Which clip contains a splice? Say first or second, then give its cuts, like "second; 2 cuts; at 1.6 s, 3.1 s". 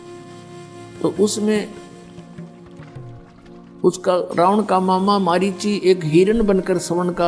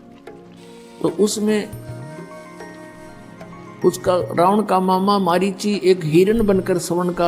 first; 2 cuts; at 1.7 s, 3.4 s